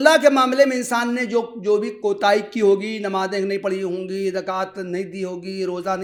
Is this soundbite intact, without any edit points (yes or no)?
yes